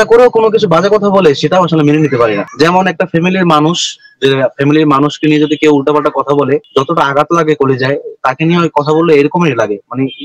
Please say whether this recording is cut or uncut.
uncut